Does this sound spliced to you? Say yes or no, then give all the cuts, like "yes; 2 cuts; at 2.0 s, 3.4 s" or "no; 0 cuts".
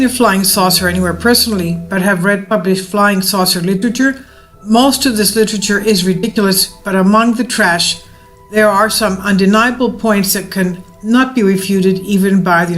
yes; 1 cut; at 3.7 s